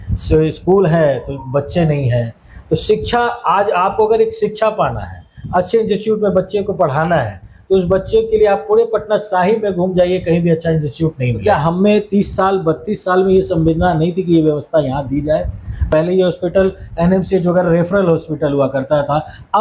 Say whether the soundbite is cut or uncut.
cut